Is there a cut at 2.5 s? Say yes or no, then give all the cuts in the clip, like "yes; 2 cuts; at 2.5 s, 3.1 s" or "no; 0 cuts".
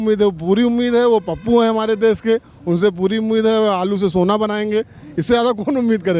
no; 0 cuts